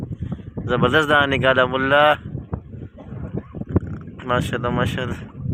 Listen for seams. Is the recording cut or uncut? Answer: uncut